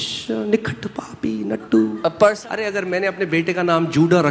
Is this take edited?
yes; 1 cut; at 2.4 s

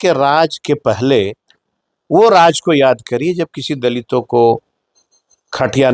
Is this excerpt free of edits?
yes; 0 cuts

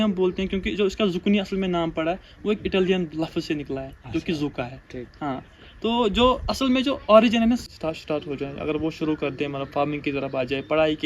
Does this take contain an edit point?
yes; 1 cut; at 7.7 s

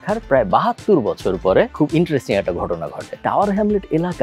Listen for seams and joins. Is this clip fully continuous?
no; 1 cut; at 3.1 s

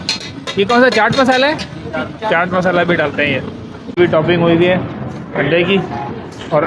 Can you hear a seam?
yes; 1 cut; at 4.0 s

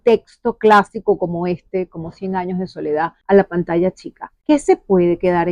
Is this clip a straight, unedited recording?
yes; 0 cuts

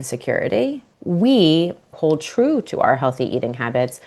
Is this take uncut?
no; 2 cuts; at 0.9 s, 1.9 s

